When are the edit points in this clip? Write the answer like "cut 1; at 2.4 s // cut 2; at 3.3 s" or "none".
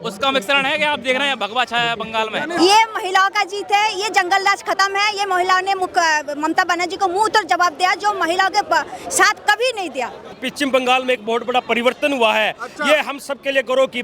cut 1; at 2.6 s // cut 2; at 10.4 s